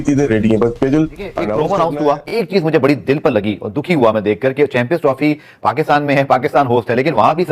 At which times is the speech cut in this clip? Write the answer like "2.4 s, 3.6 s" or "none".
1.2 s